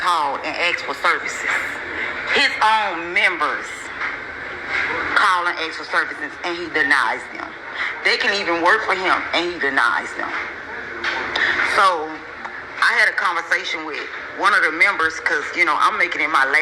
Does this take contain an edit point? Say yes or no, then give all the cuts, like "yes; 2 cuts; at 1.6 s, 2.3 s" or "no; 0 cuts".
no; 0 cuts